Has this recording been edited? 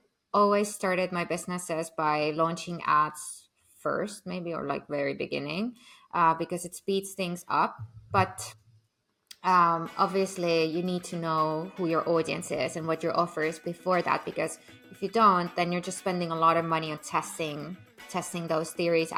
no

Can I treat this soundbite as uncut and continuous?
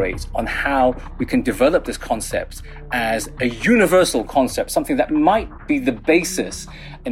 yes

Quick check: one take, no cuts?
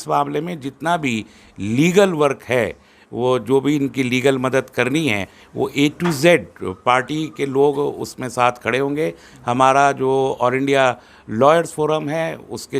yes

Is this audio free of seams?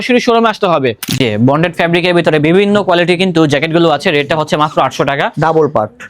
no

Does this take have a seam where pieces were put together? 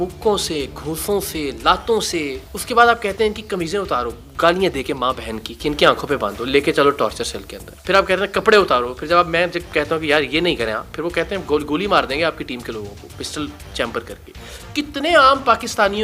yes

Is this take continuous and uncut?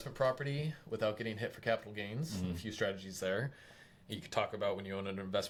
yes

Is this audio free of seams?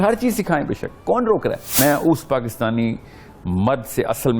no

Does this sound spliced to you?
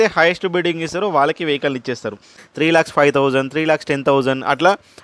yes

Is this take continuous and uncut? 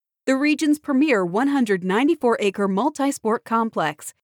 yes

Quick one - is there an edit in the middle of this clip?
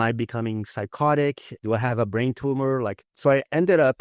yes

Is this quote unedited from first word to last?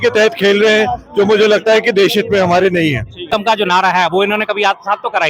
no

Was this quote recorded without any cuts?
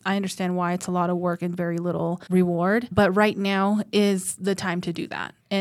no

